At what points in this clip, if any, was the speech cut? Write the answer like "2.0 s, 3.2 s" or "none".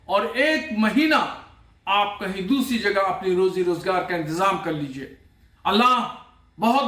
4.1 s